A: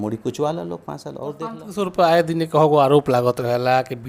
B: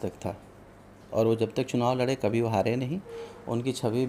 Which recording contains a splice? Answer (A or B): A